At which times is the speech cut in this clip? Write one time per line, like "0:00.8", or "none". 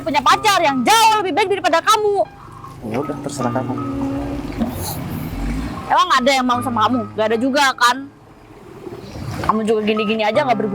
none